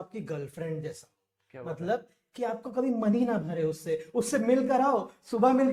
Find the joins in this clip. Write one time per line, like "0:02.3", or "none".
none